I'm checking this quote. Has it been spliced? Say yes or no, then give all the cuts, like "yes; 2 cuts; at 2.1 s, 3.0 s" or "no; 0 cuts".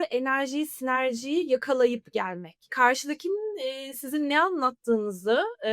yes; 1 cut; at 2.7 s